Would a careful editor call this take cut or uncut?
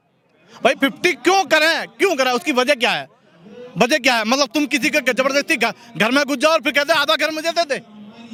uncut